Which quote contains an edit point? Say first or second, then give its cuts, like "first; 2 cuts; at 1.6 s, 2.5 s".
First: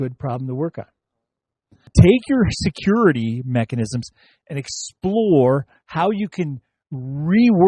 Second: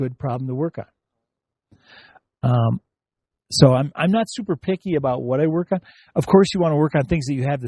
first; 1 cut; at 1.9 s